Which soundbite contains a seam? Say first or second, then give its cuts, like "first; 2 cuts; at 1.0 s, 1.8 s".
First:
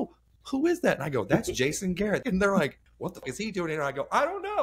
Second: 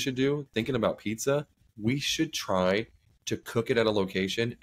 first; 2 cuts; at 2.2 s, 3.2 s